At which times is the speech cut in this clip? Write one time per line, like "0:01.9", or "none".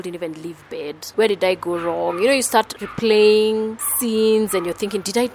0:01.0